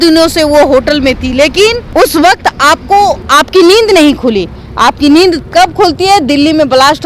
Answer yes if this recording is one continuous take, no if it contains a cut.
no